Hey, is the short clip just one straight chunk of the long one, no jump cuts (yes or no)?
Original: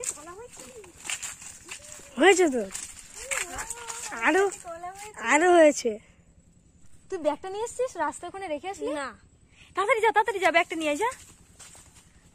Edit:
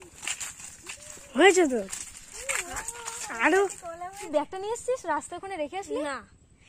no